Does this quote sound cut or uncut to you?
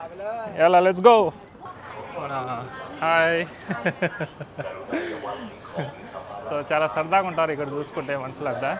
cut